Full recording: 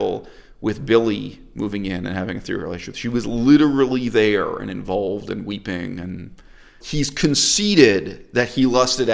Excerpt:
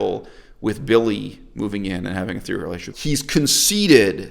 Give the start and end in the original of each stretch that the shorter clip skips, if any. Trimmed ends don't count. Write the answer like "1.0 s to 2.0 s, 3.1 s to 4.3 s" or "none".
2.9 s to 6.8 s